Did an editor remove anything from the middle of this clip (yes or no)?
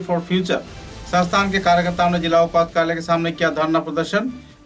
no